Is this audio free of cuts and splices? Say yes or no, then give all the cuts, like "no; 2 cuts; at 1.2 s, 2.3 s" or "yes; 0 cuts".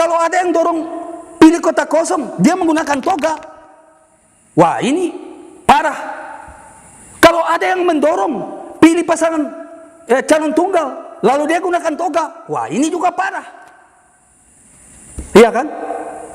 yes; 0 cuts